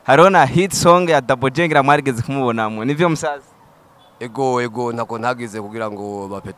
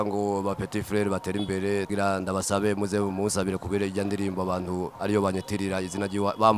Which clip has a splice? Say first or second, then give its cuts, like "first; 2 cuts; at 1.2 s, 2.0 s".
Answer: second; 1 cut; at 1.9 s